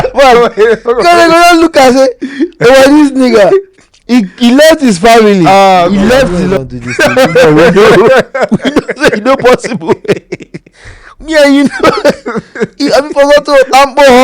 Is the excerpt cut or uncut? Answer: cut